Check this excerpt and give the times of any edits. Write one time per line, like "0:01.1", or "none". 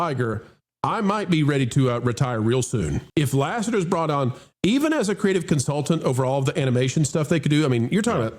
0:03.0